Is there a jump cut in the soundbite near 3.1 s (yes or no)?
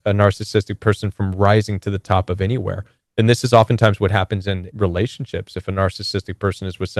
no